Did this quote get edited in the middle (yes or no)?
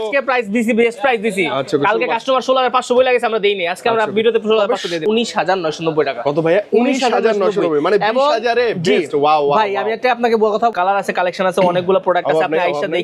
yes